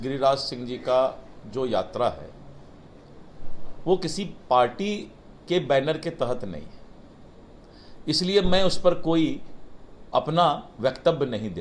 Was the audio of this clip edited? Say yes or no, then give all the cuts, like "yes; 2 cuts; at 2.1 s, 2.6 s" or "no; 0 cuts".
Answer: no; 0 cuts